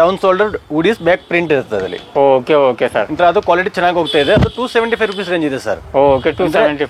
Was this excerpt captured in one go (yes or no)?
yes